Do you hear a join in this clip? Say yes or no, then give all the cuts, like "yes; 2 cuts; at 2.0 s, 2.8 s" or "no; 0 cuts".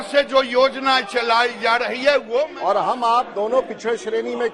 yes; 1 cut; at 2.5 s